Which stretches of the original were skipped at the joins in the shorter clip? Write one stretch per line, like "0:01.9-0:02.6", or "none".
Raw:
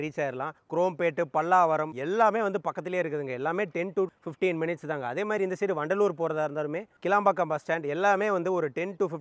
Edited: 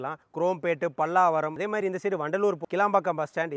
0:01.9-0:05.1
0:06.2-0:06.9